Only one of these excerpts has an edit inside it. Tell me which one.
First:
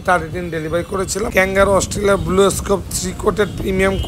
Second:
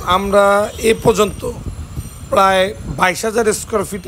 first; 1 cut; at 1.3 s

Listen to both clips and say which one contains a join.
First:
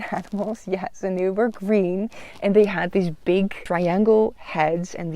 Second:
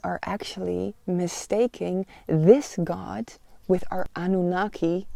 first; 1 cut; at 3.6 s

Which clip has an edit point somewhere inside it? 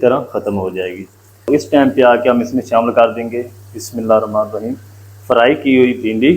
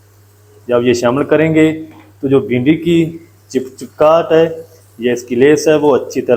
first; 1 cut; at 1.5 s

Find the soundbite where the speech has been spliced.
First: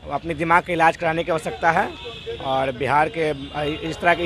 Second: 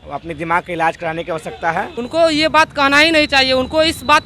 second; 1 cut; at 2.0 s

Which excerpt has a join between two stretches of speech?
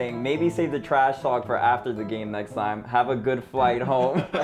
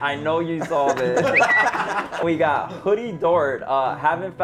second; 1 cut; at 2.2 s

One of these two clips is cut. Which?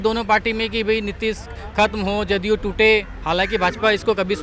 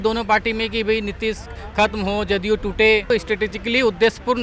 second; 1 cut; at 3.0 s

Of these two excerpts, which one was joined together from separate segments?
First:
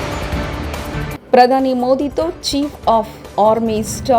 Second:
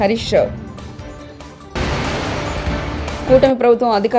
first; 1 cut; at 1.1 s

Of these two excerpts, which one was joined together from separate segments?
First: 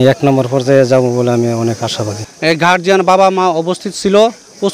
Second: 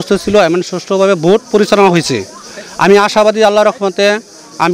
first; 1 cut; at 2.2 s

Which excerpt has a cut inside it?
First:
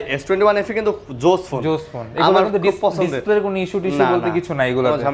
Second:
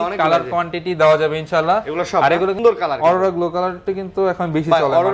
second; 1 cut; at 2.6 s

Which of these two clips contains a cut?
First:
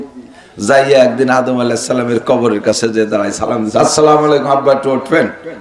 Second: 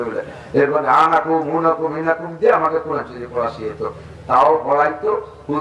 first; 1 cut; at 3.8 s

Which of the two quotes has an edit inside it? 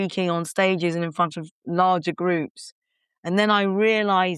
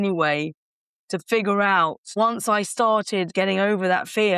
second; 2 cuts; at 2.1 s, 3.3 s

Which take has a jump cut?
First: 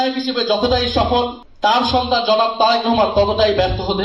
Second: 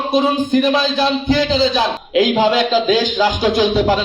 second; 1 cut; at 2.0 s

